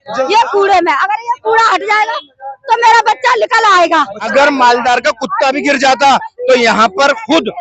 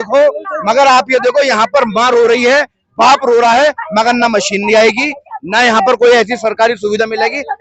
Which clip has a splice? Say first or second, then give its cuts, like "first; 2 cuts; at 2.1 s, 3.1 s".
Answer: first; 1 cut; at 4.3 s